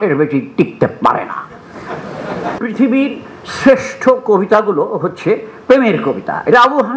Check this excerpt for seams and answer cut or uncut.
cut